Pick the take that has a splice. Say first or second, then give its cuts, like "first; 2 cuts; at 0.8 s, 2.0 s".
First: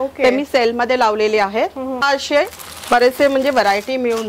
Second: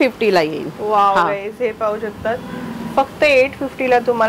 first; 1 cut; at 2.0 s